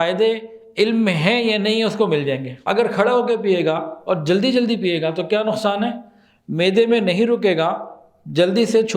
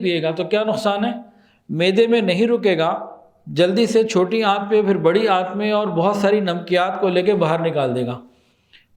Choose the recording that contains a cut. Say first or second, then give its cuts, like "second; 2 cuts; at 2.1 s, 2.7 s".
first; 1 cut; at 2.5 s